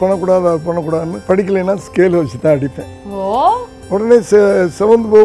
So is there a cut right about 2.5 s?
no; 2 cuts; at 1.1 s, 3.7 s

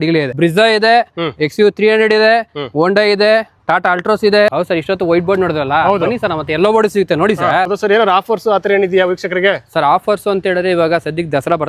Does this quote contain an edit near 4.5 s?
yes; 2 cuts; at 4.5 s, 7.7 s

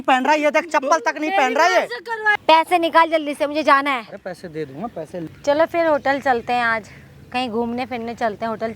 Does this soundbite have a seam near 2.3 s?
yes; 2 cuts; at 2.3 s, 5.2 s

